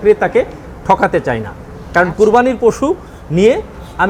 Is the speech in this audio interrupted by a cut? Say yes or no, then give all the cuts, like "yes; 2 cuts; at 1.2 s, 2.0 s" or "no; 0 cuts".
no; 0 cuts